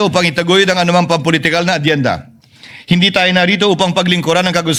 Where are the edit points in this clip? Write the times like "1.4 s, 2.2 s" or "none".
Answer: none